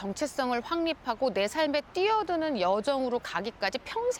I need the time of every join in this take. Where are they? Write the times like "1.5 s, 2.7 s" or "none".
none